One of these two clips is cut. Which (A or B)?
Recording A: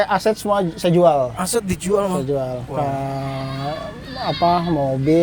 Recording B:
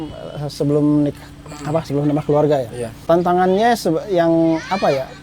B